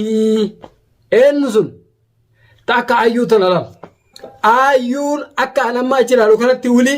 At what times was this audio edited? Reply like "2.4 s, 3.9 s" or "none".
4.1 s